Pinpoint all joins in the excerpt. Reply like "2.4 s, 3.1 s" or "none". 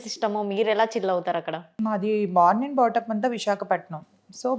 1.8 s